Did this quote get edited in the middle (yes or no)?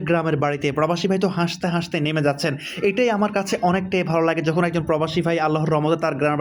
no